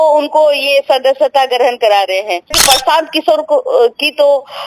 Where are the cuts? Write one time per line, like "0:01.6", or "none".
0:02.5